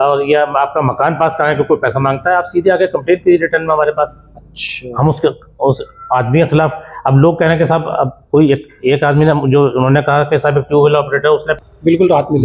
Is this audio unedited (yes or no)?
no